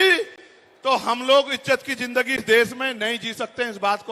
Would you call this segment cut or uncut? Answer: uncut